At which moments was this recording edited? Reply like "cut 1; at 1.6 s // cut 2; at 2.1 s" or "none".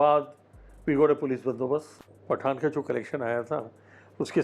cut 1; at 2.0 s